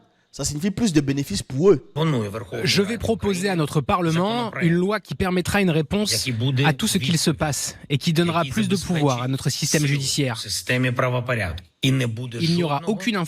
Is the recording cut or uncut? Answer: cut